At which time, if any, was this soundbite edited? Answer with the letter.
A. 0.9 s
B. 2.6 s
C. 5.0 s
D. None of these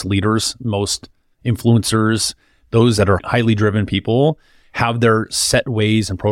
D